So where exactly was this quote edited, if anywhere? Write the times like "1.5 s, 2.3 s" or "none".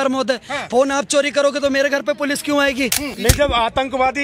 3.1 s